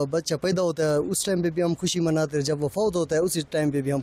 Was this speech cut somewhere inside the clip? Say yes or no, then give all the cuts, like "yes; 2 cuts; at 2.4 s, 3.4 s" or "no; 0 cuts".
no; 0 cuts